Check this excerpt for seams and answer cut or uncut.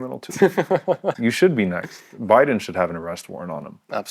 cut